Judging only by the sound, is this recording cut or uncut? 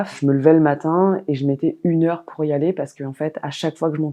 uncut